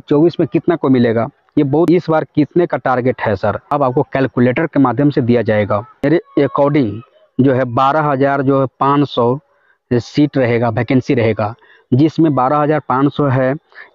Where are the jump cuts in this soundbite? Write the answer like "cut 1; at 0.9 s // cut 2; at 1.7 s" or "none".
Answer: cut 1; at 1.9 s // cut 2; at 3.7 s // cut 3; at 6.0 s

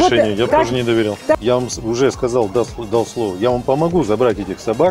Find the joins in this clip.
cut 1; at 1.3 s

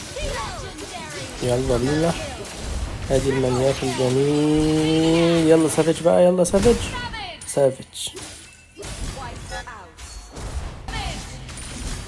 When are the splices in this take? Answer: cut 1; at 10.9 s

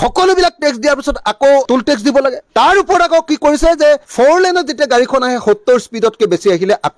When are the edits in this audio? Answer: none

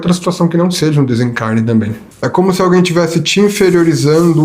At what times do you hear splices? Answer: cut 1; at 2.0 s

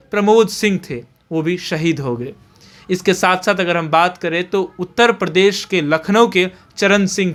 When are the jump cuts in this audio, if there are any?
none

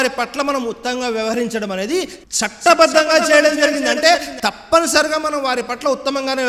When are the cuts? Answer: none

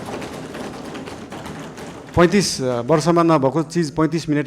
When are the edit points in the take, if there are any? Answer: cut 1; at 1.3 s

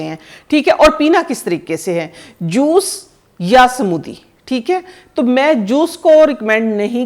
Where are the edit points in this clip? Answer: none

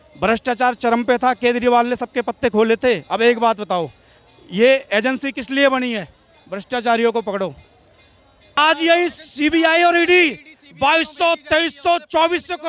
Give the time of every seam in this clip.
cut 1; at 8.6 s

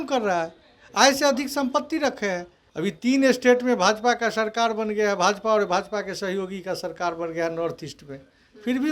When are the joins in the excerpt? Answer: cut 1; at 2.6 s

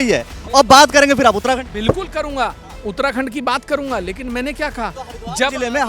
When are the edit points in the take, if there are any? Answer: none

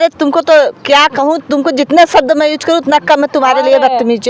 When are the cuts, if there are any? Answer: none

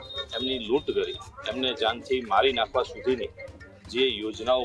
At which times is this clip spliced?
none

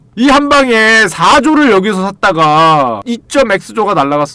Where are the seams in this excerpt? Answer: cut 1; at 3.1 s

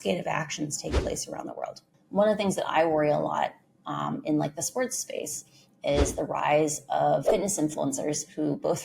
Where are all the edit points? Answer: cut 1; at 2.0 s // cut 2; at 7.2 s

